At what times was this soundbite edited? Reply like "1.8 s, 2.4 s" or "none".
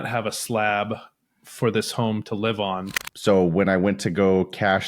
3.0 s